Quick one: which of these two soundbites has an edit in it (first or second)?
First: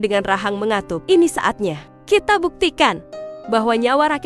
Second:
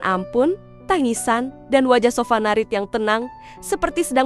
first